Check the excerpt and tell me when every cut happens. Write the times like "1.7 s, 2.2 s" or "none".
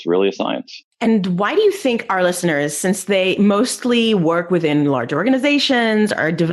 none